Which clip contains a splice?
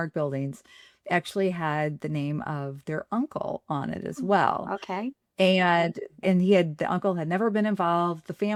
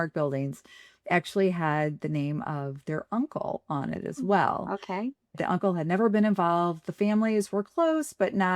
second; 1 cut; at 5.3 s

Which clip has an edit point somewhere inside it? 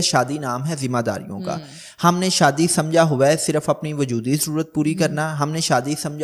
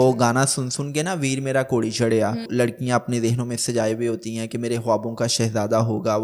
second; 1 cut; at 2.5 s

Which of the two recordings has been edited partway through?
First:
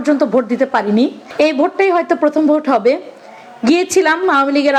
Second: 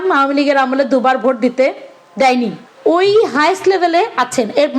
second; 1 cut; at 2.6 s

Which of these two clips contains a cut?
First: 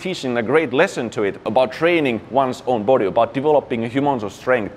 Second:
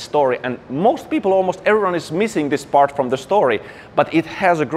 first; 1 cut; at 1.5 s

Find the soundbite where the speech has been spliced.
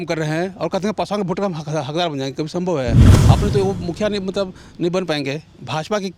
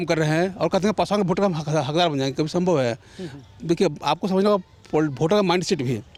first; 1 cut; at 3.1 s

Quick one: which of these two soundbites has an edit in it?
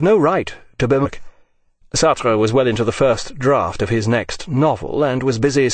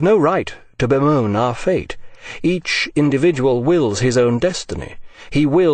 second; 1 cut; at 1.0 s

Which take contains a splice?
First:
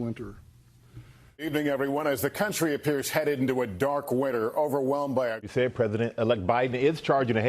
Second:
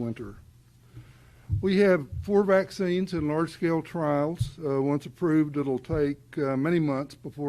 first; 2 cuts; at 1.5 s, 5.4 s

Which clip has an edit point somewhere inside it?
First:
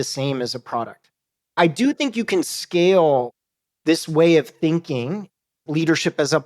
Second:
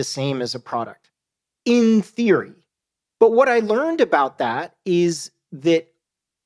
first; 2 cuts; at 1.6 s, 5.6 s

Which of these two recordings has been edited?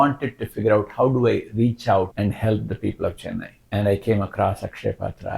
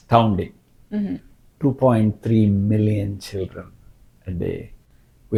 first; 2 cuts; at 2.1 s, 3.6 s

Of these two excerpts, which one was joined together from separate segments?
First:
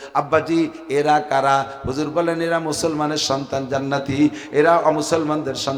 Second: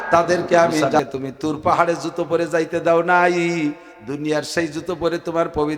second; 1 cut; at 1.0 s

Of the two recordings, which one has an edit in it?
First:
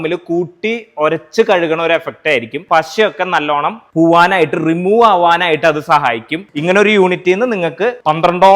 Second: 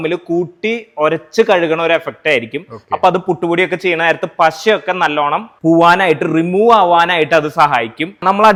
first; 2 cuts; at 2.6 s, 6.4 s

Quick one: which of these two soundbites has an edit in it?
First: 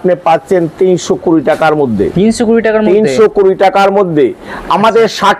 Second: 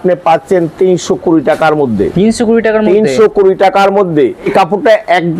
second; 1 cut; at 4.5 s

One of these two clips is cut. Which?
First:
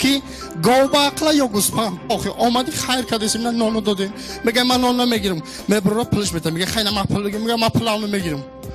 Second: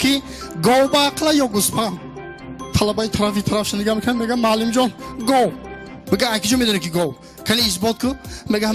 second; 1 cut; at 2.0 s

